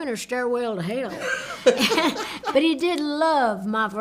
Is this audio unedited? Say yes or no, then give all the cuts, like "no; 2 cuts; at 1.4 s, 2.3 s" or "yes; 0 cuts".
no; 1 cut; at 2.3 s